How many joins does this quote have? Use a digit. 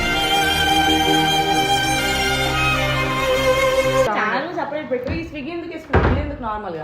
1